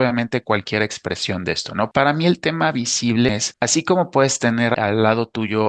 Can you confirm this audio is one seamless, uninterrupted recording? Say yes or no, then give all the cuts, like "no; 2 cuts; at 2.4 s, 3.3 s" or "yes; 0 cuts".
no; 3 cuts; at 1.9 s, 3.3 s, 4.8 s